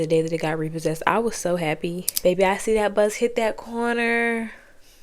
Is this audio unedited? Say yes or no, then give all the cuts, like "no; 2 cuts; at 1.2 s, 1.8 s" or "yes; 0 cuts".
no; 1 cut; at 2.1 s